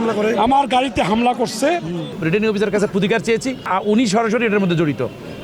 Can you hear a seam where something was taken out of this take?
yes; 2 cuts; at 2.1 s, 3.7 s

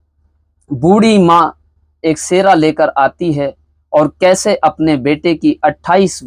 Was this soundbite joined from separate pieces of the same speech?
no; 0 cuts

